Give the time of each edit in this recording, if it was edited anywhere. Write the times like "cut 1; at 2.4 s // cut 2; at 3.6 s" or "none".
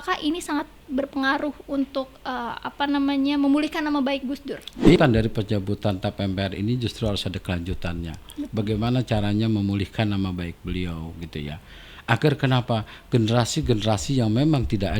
cut 1; at 5.0 s